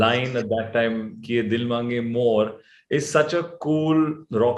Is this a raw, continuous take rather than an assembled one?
yes; 0 cuts

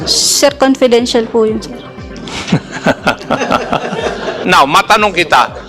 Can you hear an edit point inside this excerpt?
yes; 1 cut; at 4.4 s

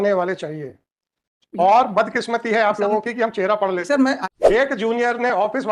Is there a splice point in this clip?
yes; 1 cut; at 4.3 s

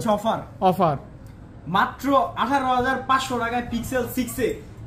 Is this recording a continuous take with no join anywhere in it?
yes; 0 cuts

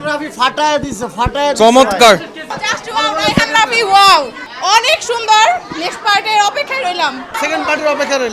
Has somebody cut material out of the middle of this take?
yes; 3 cuts; at 2.5 s, 4.4 s, 7.3 s

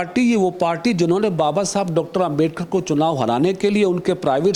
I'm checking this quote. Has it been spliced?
no; 0 cuts

